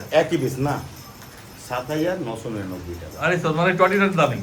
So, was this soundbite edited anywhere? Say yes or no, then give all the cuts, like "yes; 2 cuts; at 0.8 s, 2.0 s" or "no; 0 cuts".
no; 0 cuts